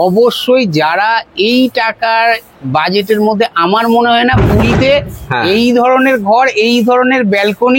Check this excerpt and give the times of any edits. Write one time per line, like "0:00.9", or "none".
none